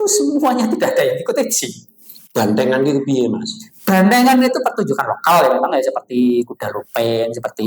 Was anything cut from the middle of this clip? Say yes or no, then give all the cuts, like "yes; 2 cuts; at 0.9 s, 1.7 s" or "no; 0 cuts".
no; 0 cuts